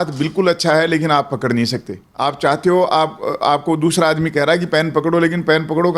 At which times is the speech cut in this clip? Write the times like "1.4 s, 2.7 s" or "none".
2.0 s